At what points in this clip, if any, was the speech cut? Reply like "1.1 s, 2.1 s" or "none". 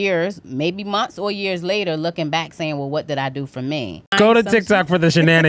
4.0 s